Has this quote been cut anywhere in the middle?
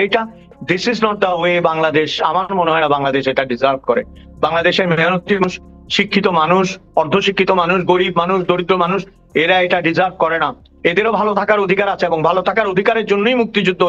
no; 0 cuts

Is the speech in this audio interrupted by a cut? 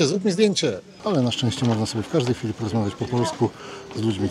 yes; 1 cut; at 0.9 s

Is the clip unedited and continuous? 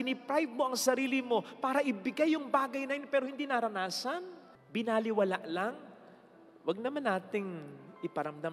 yes; 0 cuts

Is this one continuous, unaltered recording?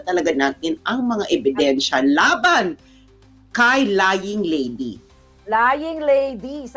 yes; 0 cuts

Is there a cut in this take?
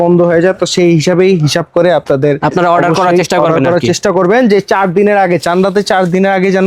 no; 0 cuts

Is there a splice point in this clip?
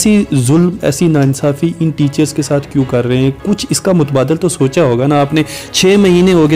no; 0 cuts

